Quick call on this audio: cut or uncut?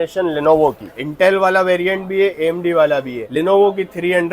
cut